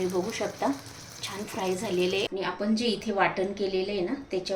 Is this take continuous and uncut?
no; 1 cut; at 2.4 s

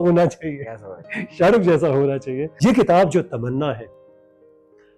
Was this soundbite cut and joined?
yes; 1 cut; at 2.4 s

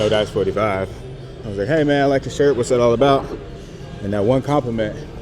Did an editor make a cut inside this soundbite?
yes; 1 cut; at 1.4 s

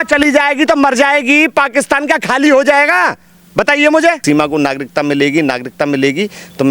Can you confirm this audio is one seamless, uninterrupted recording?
no; 1 cut; at 4.2 s

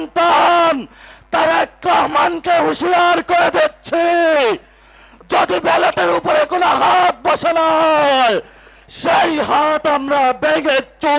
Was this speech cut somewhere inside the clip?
no; 0 cuts

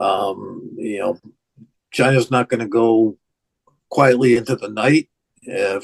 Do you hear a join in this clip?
no; 0 cuts

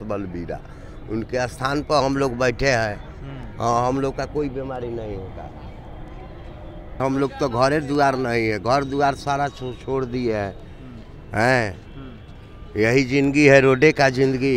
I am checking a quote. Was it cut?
yes; 1 cut; at 7.0 s

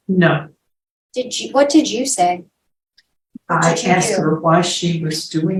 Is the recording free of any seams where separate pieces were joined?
yes; 0 cuts

